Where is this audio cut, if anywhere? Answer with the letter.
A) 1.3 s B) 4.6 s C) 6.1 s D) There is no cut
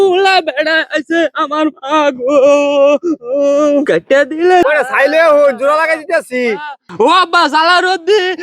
B